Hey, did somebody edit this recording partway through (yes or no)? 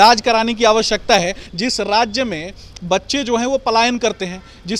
no